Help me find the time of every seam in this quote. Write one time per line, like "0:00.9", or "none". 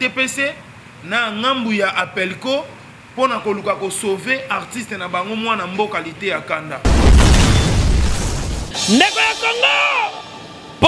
0:06.9